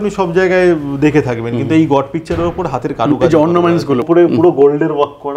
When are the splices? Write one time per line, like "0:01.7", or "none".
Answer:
0:04.0